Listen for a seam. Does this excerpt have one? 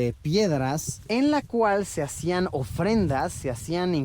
yes; 1 cut; at 0.9 s

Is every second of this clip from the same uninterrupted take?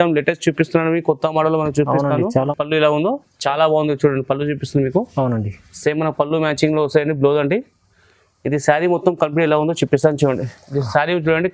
no; 1 cut; at 2.5 s

